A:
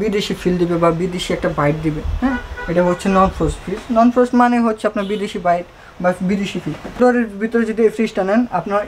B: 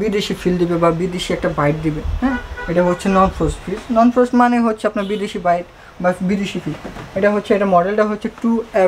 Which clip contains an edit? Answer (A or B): A